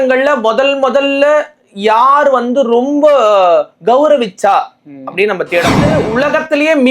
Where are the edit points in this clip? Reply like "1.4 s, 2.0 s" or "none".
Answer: 6.0 s